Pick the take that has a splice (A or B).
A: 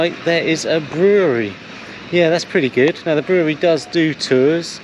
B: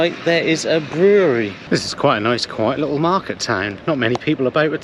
B